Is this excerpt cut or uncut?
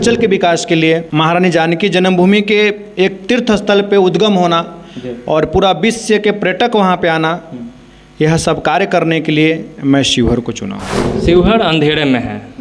cut